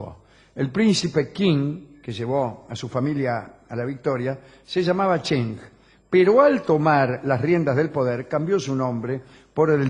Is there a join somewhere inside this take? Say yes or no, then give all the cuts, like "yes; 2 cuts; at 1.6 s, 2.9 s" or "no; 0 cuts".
yes; 1 cut; at 4.8 s